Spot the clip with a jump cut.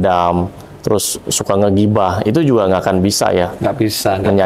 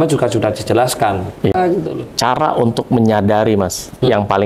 second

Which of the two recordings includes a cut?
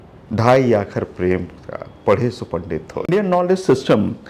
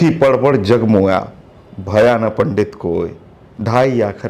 first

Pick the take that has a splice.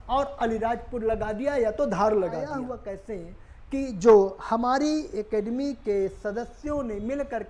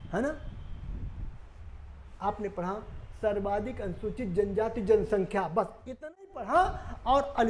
first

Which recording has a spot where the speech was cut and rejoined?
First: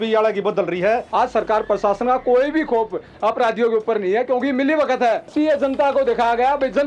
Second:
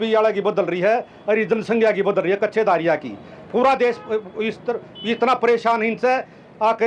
first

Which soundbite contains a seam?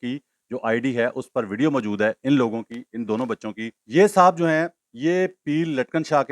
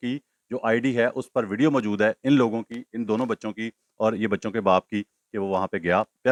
first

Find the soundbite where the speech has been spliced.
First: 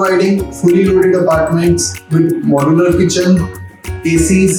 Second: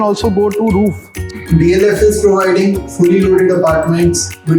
second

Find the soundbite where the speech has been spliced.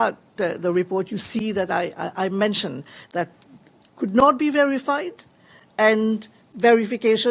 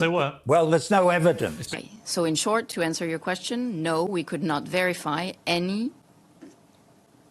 second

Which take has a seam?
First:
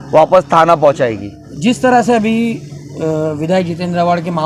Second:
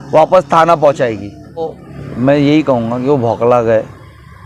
second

